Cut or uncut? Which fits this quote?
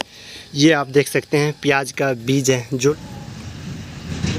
cut